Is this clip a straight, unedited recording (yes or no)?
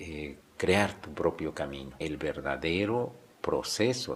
no